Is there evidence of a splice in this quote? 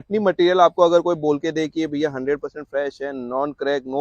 no; 0 cuts

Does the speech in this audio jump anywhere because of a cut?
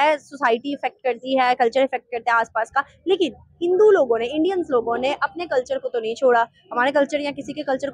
no; 0 cuts

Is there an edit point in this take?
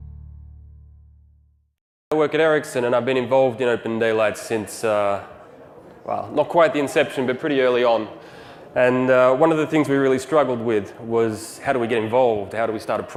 no; 0 cuts

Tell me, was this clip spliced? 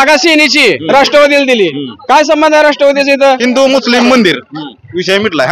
yes; 2 cuts; at 0.8 s, 3.4 s

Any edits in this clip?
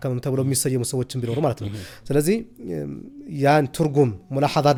no; 0 cuts

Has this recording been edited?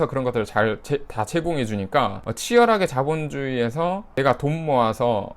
yes; 2 cuts; at 2.3 s, 4.1 s

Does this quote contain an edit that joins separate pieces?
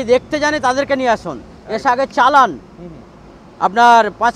no; 0 cuts

